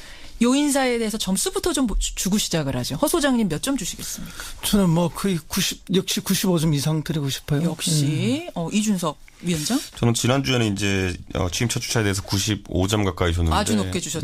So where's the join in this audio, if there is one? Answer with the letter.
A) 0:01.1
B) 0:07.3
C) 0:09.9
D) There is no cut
C